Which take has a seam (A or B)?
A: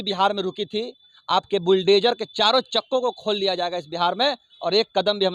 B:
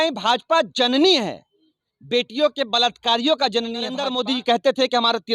B